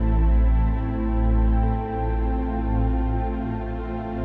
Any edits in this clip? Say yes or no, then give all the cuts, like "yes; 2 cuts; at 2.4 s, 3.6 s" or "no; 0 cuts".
no; 0 cuts